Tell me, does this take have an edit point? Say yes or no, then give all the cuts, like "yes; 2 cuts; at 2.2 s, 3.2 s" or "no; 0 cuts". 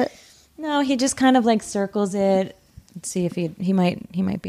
no; 0 cuts